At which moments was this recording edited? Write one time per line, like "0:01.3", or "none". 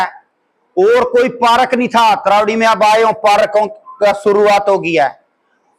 none